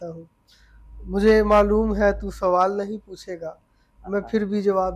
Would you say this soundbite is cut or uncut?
uncut